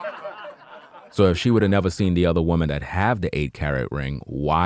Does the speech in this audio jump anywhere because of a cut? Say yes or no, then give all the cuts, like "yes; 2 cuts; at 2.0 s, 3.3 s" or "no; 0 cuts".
no; 0 cuts